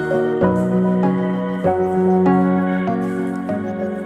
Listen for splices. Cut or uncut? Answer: uncut